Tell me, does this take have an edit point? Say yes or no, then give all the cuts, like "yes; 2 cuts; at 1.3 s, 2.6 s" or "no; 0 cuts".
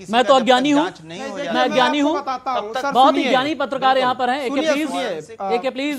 no; 0 cuts